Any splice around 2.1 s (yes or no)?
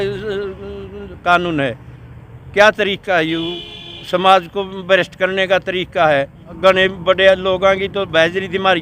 no